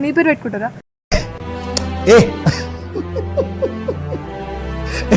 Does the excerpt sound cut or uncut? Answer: uncut